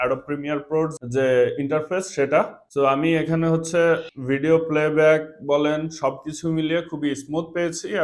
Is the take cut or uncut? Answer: cut